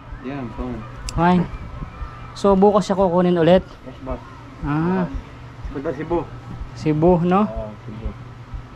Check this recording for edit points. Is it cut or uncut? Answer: uncut